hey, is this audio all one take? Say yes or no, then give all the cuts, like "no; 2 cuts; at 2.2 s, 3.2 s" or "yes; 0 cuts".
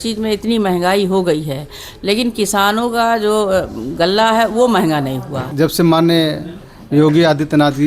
no; 1 cut; at 5.5 s